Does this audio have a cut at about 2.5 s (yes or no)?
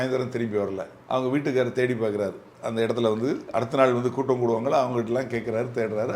no